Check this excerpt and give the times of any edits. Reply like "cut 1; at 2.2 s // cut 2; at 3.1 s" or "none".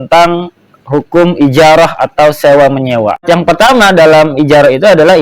cut 1; at 3.2 s